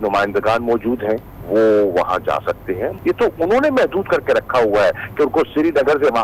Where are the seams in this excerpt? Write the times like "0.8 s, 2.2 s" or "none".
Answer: 1.4 s, 2.9 s

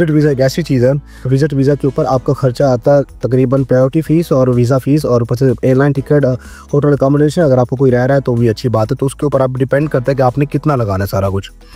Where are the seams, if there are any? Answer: none

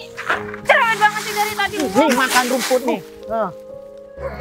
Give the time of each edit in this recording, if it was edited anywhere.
none

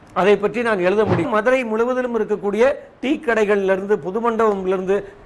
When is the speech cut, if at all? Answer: 1.3 s

